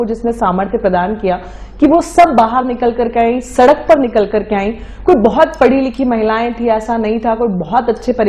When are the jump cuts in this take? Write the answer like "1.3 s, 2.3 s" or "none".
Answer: none